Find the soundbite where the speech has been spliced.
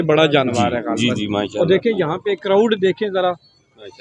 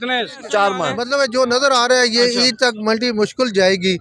second; 1 cut; at 1.0 s

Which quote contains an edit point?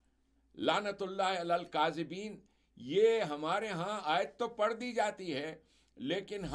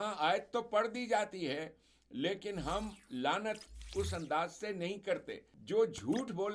second; 1 cut; at 5.5 s

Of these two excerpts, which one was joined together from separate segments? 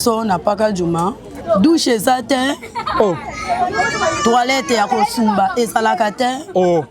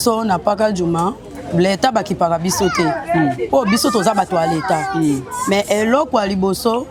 first; 1 cut; at 1.3 s

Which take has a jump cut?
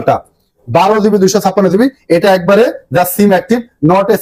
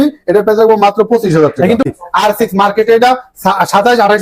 second; 1 cut; at 1.8 s

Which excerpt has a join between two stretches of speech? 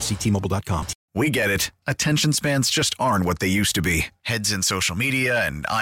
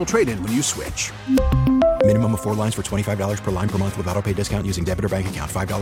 first; 1 cut; at 1.0 s

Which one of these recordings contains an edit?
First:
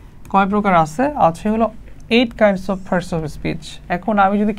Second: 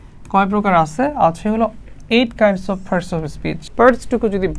second; 1 cut; at 3.6 s

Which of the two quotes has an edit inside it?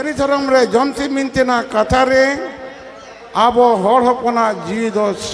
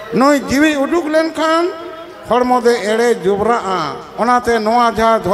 second; 1 cut; at 4.0 s

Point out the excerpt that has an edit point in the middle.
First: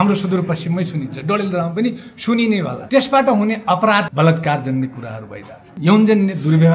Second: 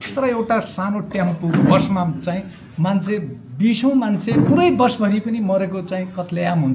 first; 3 cuts; at 2.8 s, 4.1 s, 5.8 s

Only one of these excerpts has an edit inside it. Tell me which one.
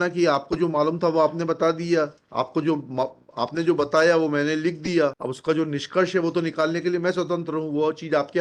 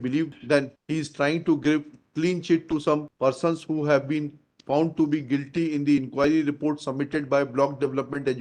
first; 1 cut; at 5.3 s

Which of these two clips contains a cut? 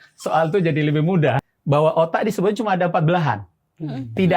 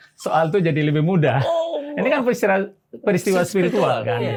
first; 1 cut; at 1.4 s

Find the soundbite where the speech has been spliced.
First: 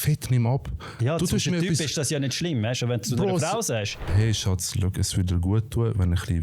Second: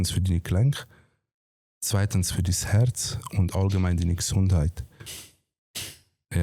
first; 1 cut; at 4.1 s

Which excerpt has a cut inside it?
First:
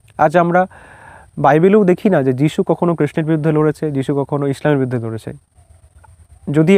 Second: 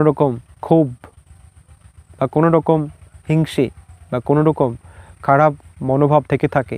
first; 1 cut; at 5.6 s

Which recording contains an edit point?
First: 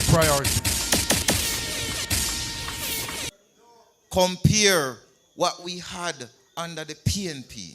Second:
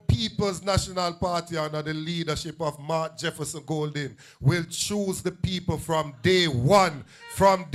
first; 1 cut; at 3.3 s

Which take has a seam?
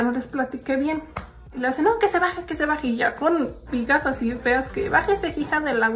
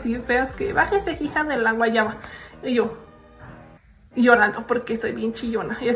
first; 1 cut; at 1.5 s

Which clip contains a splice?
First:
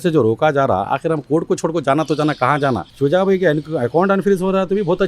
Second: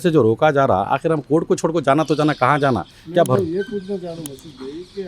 first; 1 cut; at 2.9 s

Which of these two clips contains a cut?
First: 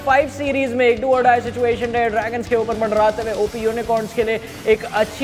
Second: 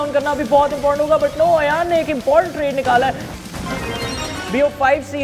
second; 1 cut; at 3.3 s

